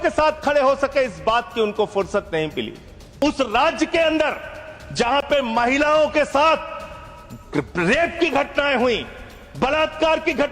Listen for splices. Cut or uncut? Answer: cut